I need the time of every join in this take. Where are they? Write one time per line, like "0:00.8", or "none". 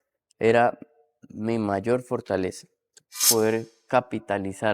0:03.3